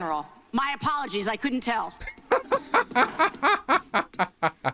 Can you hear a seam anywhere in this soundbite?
no; 0 cuts

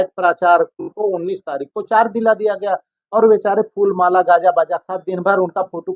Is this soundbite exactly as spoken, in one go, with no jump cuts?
no; 1 cut; at 0.9 s

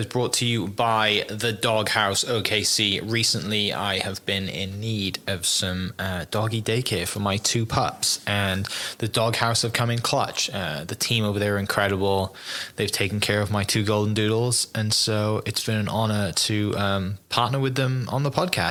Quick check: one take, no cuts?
yes; 0 cuts

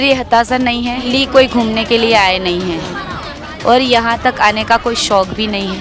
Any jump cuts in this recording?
yes; 1 cut; at 1.1 s

